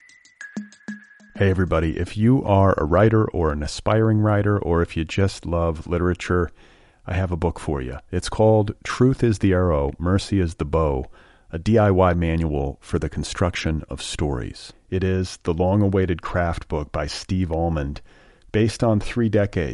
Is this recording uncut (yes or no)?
no